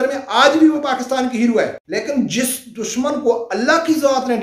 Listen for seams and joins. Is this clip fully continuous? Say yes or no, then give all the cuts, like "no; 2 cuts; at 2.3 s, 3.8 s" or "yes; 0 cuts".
no; 1 cut; at 1.8 s